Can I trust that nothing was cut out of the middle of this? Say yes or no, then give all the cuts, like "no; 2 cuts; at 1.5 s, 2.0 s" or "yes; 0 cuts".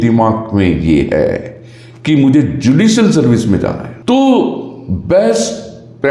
yes; 0 cuts